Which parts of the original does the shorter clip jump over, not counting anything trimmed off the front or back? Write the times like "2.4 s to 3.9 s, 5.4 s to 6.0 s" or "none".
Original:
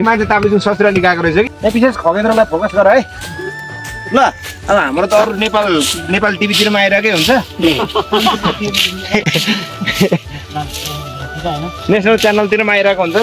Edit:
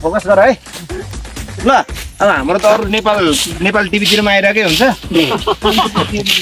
none